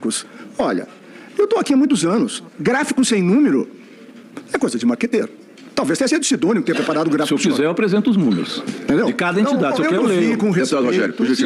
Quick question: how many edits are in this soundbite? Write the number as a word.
zero